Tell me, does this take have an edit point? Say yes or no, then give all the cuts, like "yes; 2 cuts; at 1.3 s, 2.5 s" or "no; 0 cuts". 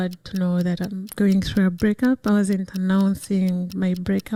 no; 0 cuts